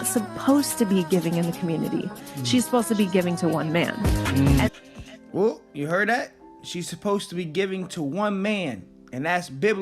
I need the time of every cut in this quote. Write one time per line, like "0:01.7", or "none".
none